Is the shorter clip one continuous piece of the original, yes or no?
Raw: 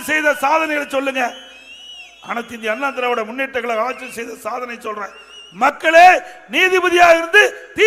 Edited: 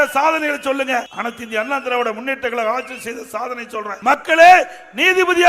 no